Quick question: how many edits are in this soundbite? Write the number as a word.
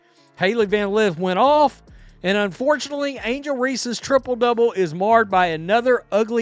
zero